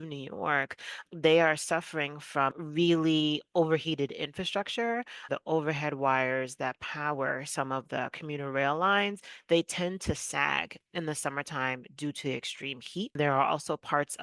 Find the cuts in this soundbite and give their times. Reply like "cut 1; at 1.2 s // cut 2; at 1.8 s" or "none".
cut 1; at 1.0 s // cut 2; at 2.6 s // cut 3; at 5.2 s // cut 4; at 13.1 s